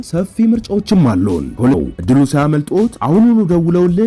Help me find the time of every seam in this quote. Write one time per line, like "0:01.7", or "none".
0:01.8